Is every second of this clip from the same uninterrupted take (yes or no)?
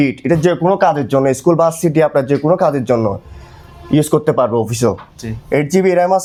yes